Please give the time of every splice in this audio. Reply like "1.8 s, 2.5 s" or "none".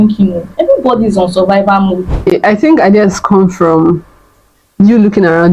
2.3 s